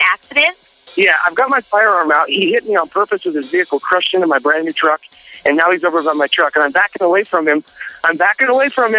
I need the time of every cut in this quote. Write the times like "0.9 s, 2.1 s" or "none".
none